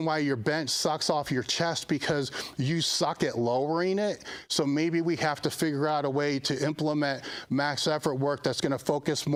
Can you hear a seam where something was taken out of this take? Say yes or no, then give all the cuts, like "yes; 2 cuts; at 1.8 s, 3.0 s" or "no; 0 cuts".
no; 0 cuts